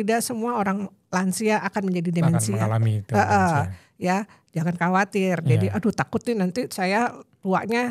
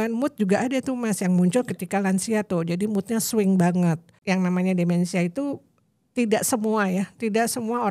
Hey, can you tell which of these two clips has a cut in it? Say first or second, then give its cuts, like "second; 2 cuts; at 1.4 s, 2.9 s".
second; 1 cut; at 4.1 s